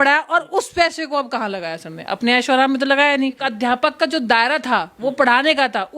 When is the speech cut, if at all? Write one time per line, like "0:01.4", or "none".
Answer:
0:03.4